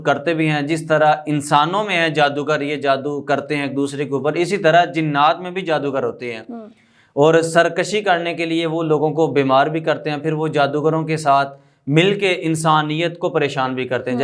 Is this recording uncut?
yes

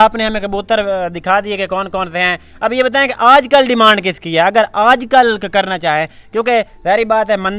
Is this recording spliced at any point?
no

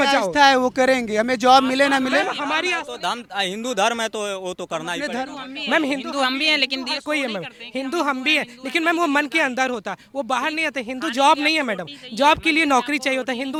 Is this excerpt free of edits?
yes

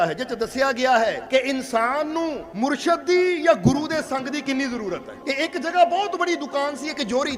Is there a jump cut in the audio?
yes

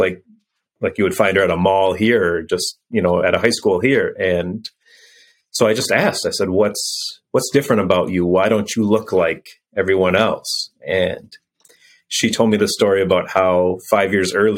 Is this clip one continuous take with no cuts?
yes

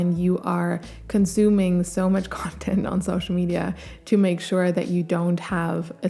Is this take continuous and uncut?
yes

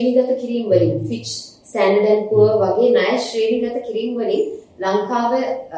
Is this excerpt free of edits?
yes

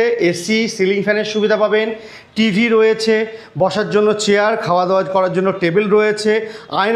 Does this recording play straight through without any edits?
yes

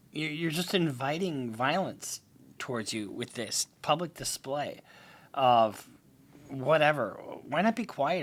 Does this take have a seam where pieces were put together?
no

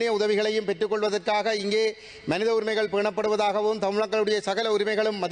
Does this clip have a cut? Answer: no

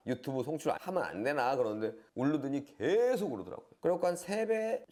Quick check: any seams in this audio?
no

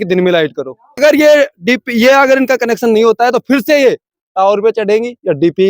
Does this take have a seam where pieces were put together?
yes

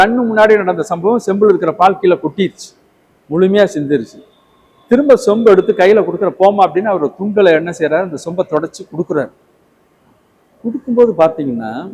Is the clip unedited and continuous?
yes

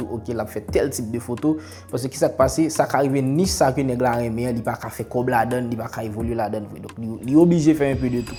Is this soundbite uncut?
yes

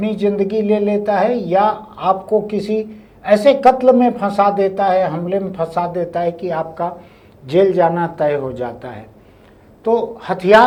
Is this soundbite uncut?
yes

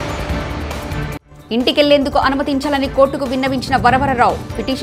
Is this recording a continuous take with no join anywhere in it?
no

